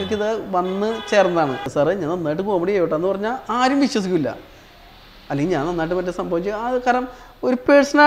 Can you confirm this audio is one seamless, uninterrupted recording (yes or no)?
no